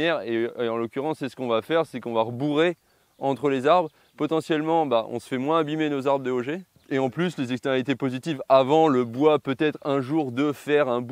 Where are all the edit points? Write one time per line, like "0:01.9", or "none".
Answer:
0:06.7